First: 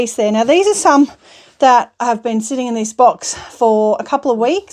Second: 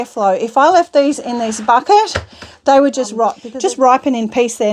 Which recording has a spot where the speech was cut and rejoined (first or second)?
second